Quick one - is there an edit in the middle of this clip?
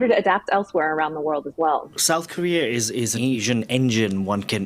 yes; 2 cuts; at 2.0 s, 3.2 s

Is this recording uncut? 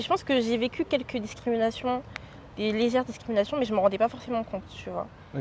yes; 0 cuts

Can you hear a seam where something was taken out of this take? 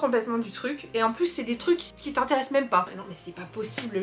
yes; 1 cut; at 3.0 s

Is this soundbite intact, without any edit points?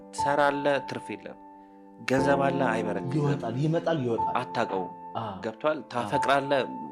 yes; 0 cuts

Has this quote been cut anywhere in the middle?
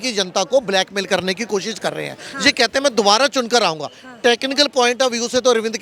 no; 0 cuts

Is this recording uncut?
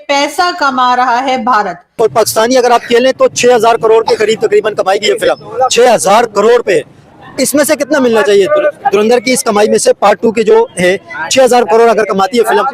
no; 1 cut; at 1.9 s

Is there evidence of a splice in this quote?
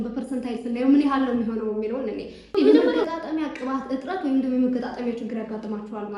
yes; 1 cut; at 2.7 s

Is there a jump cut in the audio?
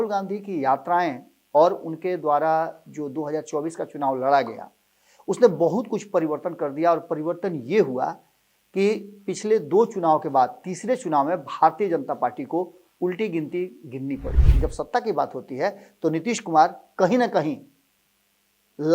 yes; 1 cut; at 14.4 s

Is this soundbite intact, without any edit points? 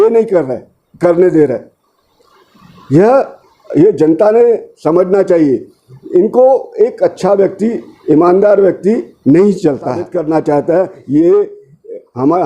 no; 1 cut; at 10.1 s

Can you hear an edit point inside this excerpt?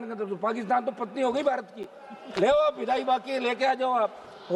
no; 0 cuts

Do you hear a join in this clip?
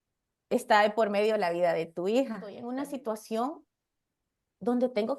yes; 1 cut; at 2.6 s

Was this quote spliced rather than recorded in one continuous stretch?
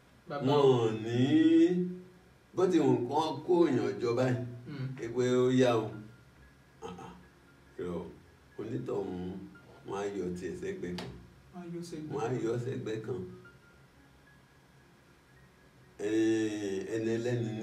no; 0 cuts

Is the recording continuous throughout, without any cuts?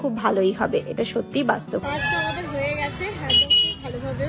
yes; 0 cuts

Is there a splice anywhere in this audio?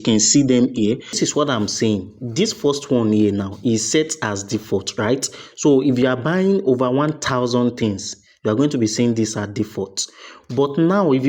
yes; 1 cut; at 1.2 s

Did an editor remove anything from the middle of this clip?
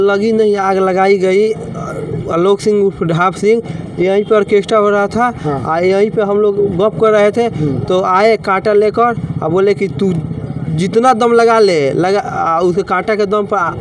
no; 0 cuts

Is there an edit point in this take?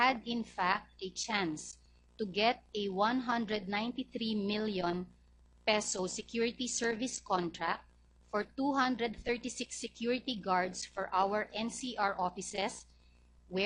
no; 0 cuts

